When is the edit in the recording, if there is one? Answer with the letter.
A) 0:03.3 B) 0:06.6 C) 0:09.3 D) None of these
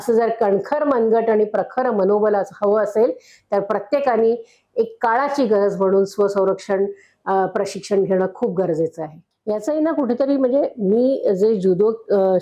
C